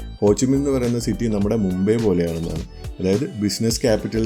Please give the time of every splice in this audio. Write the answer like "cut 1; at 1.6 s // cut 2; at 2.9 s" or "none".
none